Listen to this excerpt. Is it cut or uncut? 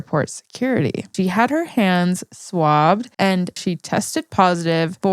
cut